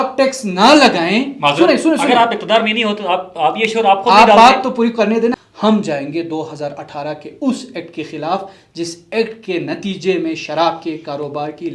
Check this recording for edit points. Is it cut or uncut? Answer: cut